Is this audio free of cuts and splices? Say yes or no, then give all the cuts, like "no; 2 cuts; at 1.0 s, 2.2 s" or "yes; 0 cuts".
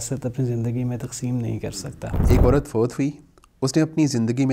no; 1 cut; at 2.2 s